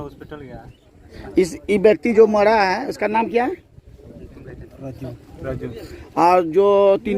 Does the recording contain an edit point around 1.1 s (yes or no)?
yes